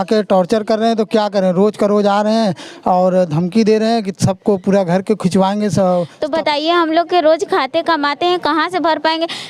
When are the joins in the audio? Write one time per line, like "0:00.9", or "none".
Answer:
0:06.2